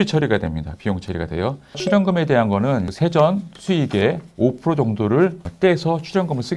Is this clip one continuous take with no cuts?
no; 3 cuts; at 1.8 s, 2.9 s, 5.4 s

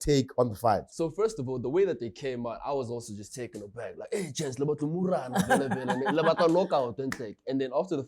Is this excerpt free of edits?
no; 1 cut; at 1.0 s

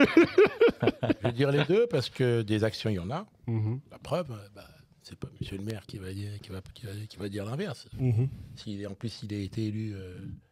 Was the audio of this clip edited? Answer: no; 0 cuts

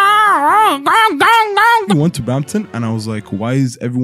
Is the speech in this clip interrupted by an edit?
yes; 1 cut; at 1.9 s

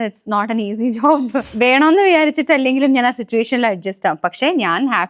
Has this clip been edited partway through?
yes; 1 cut; at 1.5 s

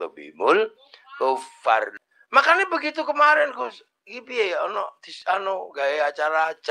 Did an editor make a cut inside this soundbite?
yes; 1 cut; at 1.9 s

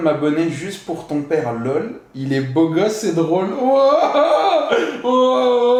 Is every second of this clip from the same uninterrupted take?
yes; 0 cuts

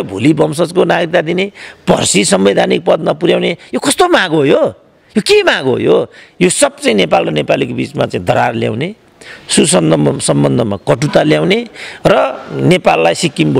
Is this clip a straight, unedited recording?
yes; 0 cuts

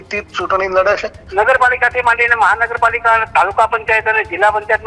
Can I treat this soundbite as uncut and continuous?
no; 1 cut; at 1.2 s

